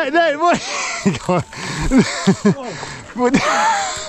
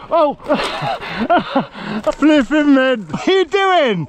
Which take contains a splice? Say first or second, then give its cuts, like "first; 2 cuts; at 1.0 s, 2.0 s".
second; 2 cuts; at 2.1 s, 3.2 s